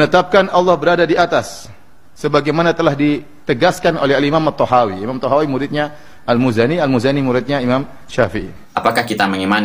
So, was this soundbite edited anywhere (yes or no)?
yes